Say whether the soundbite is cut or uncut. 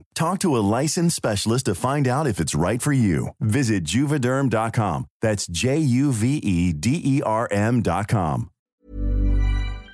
cut